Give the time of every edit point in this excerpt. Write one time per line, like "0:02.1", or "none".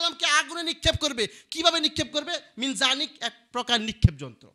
none

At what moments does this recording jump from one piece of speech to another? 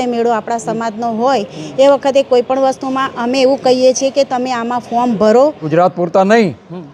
0:05.6

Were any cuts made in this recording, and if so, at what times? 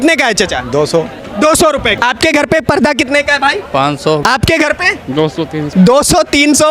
0:02.0
0:04.2
0:05.7

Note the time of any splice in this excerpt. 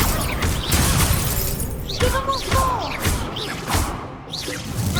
none

